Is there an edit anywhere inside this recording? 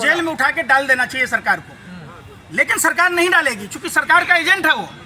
no; 0 cuts

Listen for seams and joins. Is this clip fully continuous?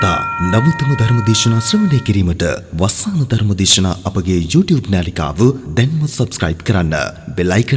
yes; 0 cuts

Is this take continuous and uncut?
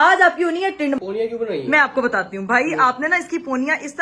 no; 1 cut; at 1.0 s

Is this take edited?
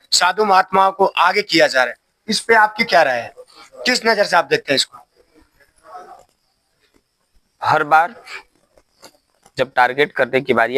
no; 0 cuts

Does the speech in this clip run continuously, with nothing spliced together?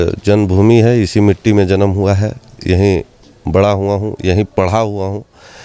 yes; 0 cuts

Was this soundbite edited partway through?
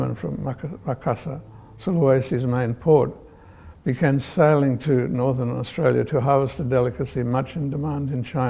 no; 0 cuts

